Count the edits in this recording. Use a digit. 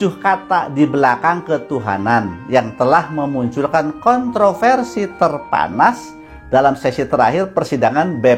0